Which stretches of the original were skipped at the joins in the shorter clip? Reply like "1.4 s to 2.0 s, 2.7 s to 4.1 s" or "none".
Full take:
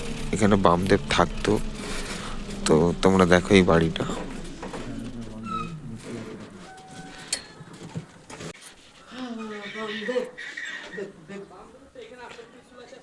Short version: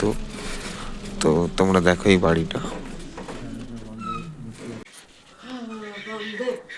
6.3 s to 8.5 s